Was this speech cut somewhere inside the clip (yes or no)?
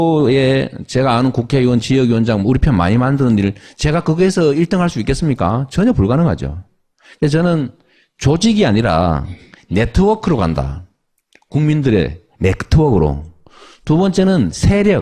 no